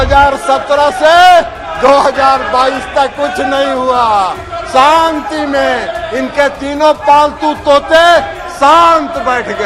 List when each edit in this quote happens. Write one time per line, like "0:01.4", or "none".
none